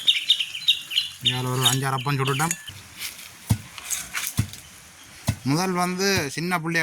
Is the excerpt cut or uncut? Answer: cut